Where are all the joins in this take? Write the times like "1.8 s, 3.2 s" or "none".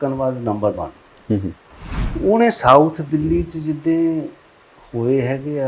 2.1 s